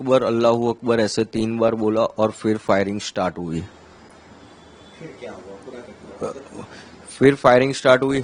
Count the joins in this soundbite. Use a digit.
0